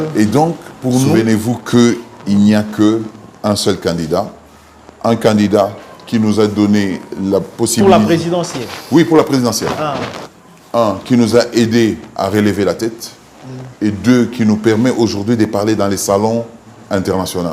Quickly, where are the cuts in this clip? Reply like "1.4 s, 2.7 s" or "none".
1.1 s